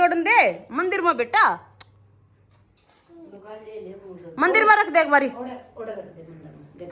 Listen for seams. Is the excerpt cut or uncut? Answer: uncut